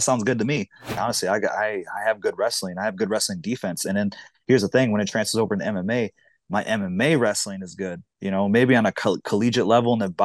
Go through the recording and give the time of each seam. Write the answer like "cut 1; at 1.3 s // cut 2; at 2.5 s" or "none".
cut 1; at 1.0 s